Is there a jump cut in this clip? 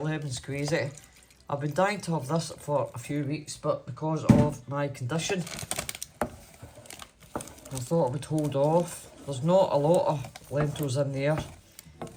no; 0 cuts

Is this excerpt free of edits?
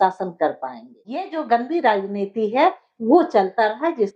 no; 1 cut; at 1.3 s

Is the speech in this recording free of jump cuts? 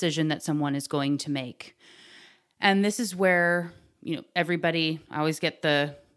yes; 0 cuts

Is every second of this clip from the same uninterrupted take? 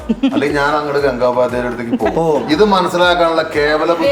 yes; 0 cuts

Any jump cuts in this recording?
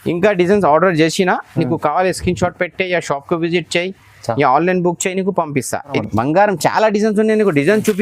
yes; 1 cut; at 6.0 s

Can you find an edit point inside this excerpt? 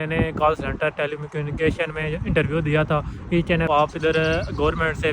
yes; 1 cut; at 3.7 s

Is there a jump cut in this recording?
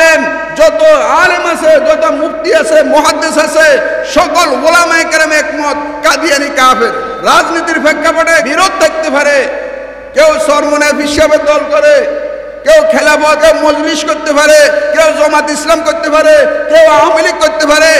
yes; 3 cuts; at 7.1 s, 8.5 s, 13.4 s

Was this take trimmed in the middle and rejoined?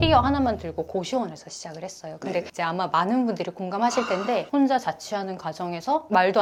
no; 0 cuts

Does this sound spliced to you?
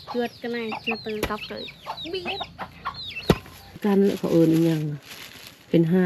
yes; 1 cut; at 3.8 s

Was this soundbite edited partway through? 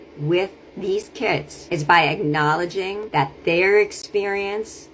yes; 2 cuts; at 1.5 s, 3.0 s

